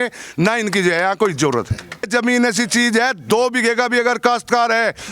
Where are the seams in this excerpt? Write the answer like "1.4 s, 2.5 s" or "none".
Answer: 2.0 s